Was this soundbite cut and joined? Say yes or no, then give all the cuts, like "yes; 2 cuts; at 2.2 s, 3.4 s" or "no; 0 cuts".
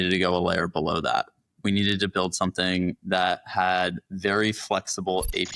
no; 0 cuts